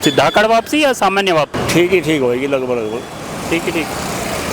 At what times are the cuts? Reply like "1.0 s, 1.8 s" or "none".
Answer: 1.5 s